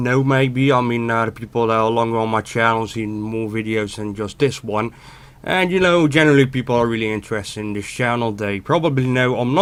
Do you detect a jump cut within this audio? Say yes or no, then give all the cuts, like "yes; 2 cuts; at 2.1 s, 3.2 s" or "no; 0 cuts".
no; 0 cuts